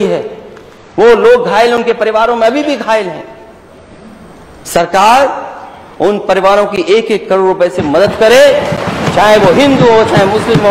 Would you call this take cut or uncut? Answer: uncut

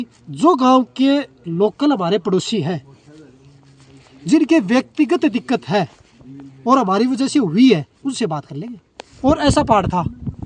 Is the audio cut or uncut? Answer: cut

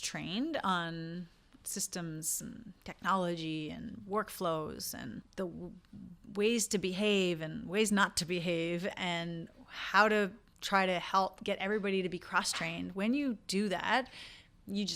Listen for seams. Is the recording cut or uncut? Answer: uncut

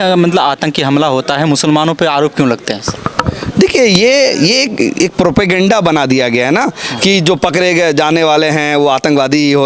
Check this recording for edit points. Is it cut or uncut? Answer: uncut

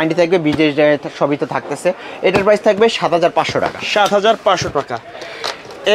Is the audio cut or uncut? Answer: uncut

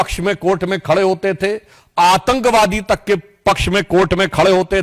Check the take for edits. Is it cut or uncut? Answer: uncut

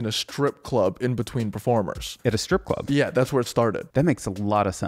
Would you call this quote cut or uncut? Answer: cut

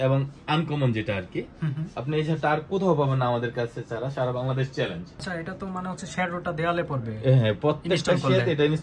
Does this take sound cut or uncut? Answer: cut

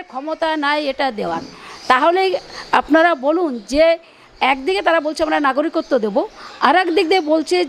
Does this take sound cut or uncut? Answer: uncut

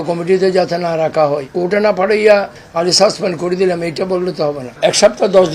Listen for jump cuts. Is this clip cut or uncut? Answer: cut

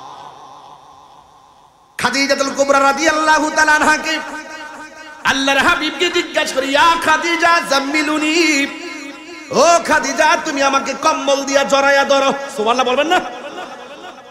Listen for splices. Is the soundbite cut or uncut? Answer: uncut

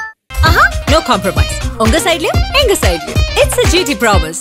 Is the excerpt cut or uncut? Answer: uncut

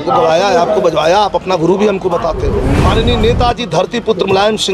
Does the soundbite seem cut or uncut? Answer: cut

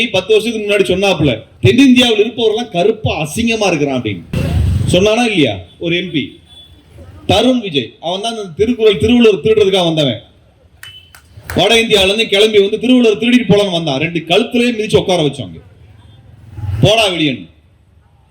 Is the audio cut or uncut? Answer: cut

